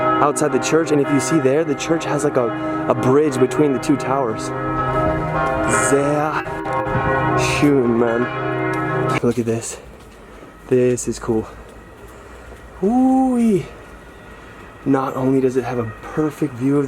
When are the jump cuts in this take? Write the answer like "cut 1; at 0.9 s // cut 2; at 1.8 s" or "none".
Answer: cut 1; at 9.2 s